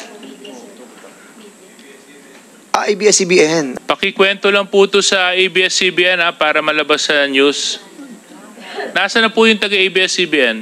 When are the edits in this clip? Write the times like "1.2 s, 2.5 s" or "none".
3.8 s

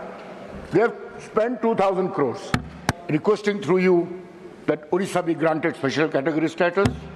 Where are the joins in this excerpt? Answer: 2.9 s

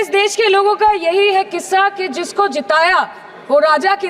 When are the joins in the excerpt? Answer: none

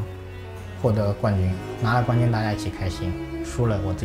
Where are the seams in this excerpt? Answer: none

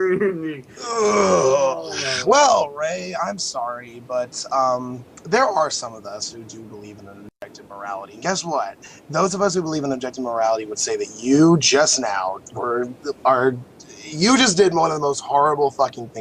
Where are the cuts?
8.2 s

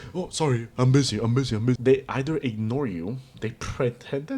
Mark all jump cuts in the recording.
1.8 s

